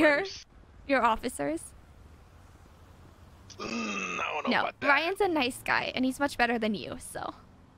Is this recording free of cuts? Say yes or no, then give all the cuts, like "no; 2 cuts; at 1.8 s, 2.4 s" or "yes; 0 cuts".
yes; 0 cuts